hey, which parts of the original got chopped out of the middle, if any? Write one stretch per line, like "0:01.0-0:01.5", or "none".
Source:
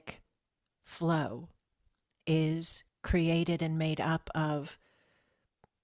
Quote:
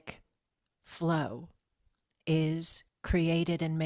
none